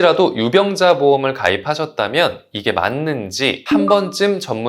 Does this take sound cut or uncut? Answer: cut